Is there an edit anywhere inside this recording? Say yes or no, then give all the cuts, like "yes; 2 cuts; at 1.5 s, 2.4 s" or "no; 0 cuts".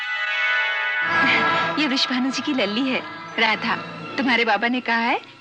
yes; 2 cuts; at 1.1 s, 4.0 s